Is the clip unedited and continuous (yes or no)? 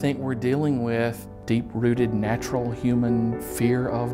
no